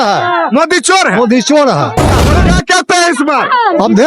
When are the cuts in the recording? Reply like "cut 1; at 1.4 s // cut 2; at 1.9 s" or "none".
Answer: cut 1; at 2.2 s